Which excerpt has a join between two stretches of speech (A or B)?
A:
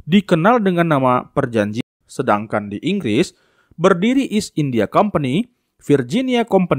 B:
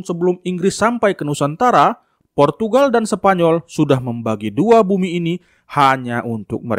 A